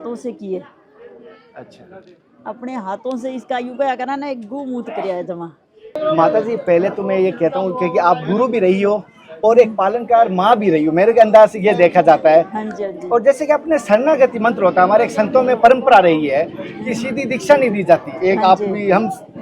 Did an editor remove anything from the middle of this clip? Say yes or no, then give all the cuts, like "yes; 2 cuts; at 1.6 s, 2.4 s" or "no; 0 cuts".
no; 0 cuts